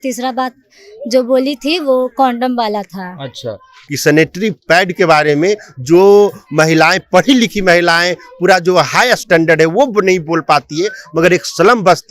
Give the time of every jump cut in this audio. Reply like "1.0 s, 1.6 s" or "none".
3.8 s